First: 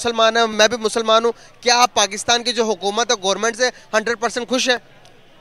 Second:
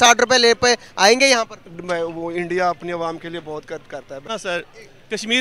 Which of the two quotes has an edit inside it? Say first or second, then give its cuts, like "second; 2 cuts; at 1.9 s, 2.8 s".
second; 1 cut; at 4.3 s